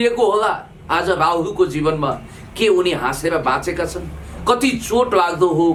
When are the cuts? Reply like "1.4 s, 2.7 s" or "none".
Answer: none